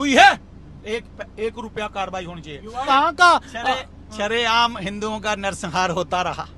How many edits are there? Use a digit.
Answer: 1